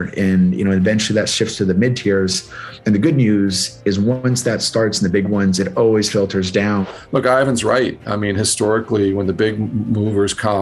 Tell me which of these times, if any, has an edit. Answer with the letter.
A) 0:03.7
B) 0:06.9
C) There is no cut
B